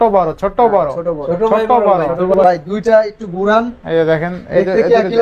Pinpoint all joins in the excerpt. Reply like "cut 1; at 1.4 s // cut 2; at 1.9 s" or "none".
cut 1; at 2.4 s